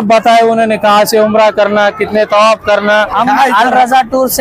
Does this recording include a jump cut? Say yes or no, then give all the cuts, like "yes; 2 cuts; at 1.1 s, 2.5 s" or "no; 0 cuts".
yes; 1 cut; at 3.1 s